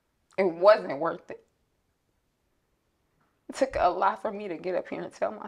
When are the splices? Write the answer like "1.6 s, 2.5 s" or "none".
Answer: none